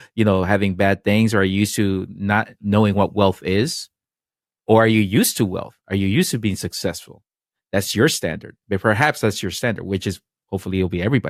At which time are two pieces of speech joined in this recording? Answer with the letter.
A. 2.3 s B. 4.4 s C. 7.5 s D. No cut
D